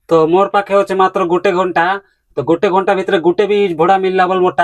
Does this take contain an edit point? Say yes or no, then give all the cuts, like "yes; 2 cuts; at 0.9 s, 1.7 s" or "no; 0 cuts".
no; 0 cuts